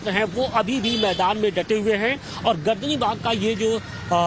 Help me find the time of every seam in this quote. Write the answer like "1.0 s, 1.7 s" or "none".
2.6 s